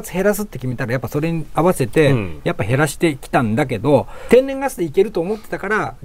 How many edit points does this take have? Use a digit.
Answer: 2